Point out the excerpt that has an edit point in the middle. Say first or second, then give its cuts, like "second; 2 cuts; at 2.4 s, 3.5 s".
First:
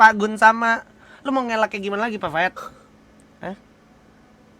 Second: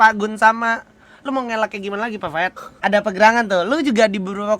second; 1 cut; at 2.7 s